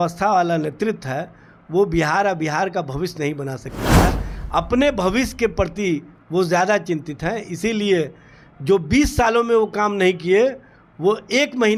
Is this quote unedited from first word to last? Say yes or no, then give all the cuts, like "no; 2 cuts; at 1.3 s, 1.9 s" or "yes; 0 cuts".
yes; 0 cuts